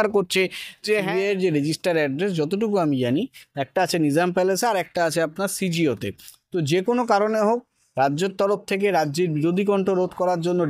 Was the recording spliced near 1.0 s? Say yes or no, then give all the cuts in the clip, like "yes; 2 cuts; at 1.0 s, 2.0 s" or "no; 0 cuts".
yes; 1 cut; at 1.0 s